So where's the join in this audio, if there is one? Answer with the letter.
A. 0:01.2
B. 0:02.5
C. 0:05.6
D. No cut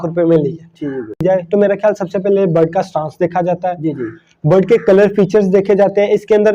A